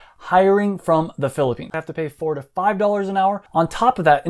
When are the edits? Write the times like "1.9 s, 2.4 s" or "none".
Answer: 1.6 s